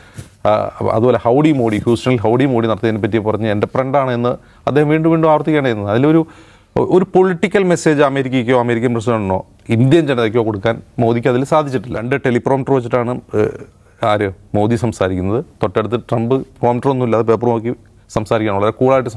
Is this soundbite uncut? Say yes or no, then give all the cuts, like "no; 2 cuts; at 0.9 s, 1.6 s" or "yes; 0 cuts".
no; 1 cut; at 11.9 s